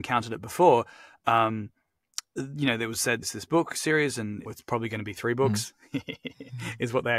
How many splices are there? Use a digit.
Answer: 2